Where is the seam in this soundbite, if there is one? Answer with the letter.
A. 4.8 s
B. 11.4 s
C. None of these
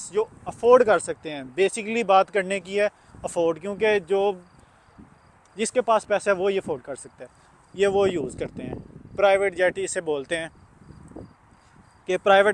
C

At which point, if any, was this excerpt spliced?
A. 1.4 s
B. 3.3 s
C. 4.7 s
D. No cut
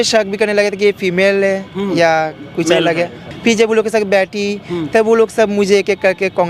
B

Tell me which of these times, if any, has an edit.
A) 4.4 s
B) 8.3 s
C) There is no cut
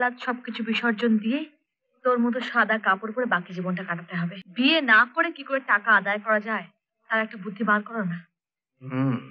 A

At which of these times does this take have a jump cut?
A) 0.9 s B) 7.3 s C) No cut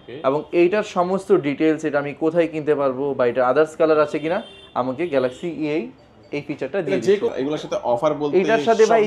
B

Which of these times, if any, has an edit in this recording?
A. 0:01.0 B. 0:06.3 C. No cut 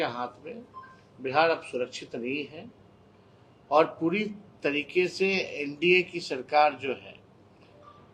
C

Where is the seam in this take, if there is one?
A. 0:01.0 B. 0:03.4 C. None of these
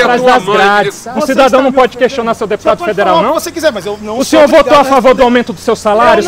A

